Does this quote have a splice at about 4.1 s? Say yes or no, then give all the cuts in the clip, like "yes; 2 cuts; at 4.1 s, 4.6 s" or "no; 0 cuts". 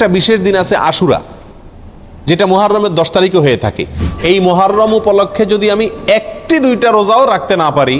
yes; 1 cut; at 4.1 s